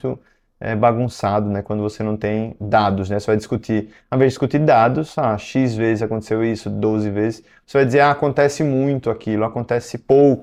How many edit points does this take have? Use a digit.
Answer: 0